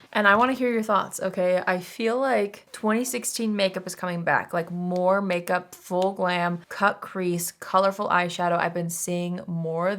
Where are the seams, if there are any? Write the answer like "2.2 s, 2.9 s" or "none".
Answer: 2.6 s, 6.7 s